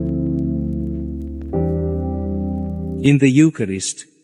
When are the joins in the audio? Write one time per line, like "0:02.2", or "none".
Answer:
0:03.0